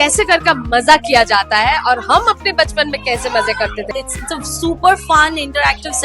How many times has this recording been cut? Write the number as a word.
one